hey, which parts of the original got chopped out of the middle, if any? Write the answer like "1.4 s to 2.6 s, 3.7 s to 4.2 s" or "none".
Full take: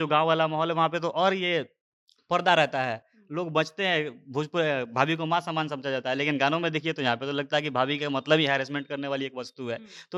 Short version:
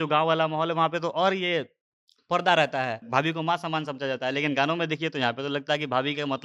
3.0 s to 4.9 s